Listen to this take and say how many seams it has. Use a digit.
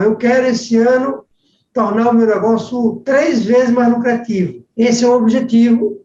1